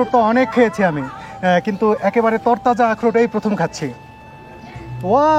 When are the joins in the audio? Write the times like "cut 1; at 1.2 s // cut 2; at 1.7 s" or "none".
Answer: none

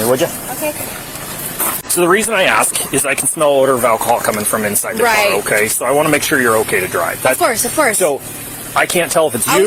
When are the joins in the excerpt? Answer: cut 1; at 1.8 s

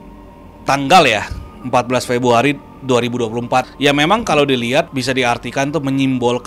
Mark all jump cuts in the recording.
cut 1; at 3.7 s // cut 2; at 4.9 s

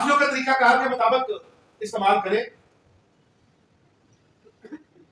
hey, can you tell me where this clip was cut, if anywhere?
none

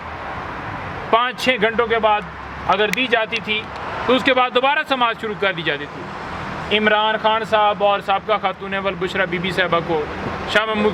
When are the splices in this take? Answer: none

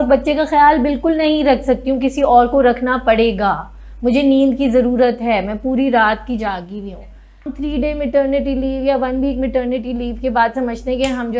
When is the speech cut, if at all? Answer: cut 1; at 7.5 s

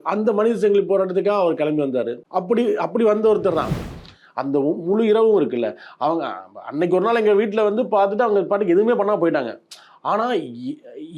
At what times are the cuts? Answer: cut 1; at 2.2 s // cut 2; at 3.7 s

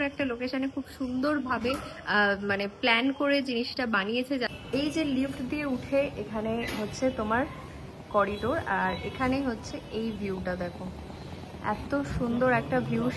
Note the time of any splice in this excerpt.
cut 1; at 4.5 s

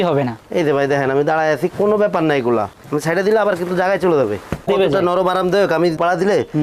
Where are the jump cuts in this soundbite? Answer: cut 1; at 2.8 s // cut 2; at 4.7 s

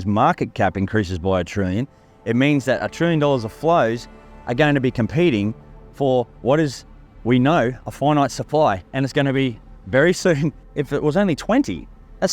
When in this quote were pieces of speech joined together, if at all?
cut 1; at 10.6 s

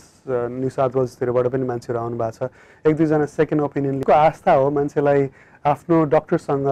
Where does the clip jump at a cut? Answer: cut 1; at 4.0 s

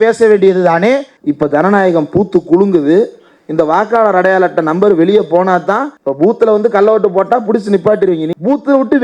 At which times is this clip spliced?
cut 1; at 1.1 s // cut 2; at 6.0 s // cut 3; at 8.3 s

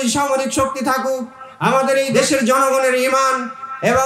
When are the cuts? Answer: cut 1; at 2.1 s

